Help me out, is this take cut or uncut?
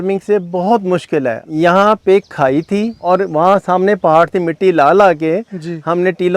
cut